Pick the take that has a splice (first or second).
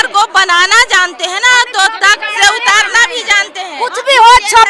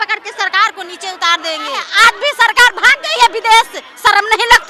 second